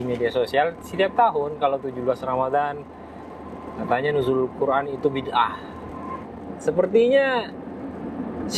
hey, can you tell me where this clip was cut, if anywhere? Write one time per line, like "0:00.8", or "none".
0:06.2

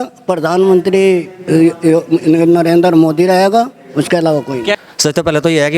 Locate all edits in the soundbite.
0:04.8

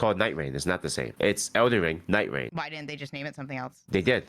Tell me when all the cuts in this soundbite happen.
0:01.1
0:02.5

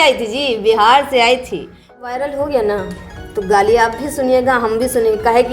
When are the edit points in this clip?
0:02.1

